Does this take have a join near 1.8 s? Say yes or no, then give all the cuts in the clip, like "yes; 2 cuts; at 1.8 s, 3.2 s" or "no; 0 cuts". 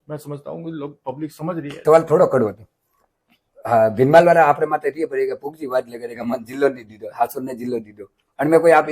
yes; 1 cut; at 1.8 s